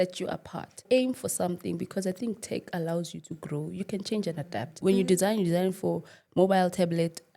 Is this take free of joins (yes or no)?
no